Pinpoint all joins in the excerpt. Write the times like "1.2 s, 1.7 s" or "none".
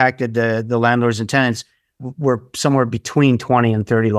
2.0 s